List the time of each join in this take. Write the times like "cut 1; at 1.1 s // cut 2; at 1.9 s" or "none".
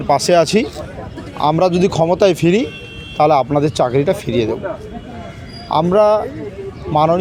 none